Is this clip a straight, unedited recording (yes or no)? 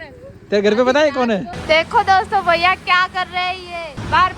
no